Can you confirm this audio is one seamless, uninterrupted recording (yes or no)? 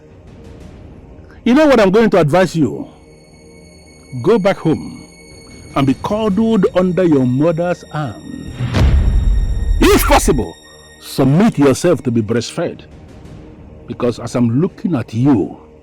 no